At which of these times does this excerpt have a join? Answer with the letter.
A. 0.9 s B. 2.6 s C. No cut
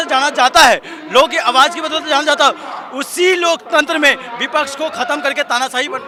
C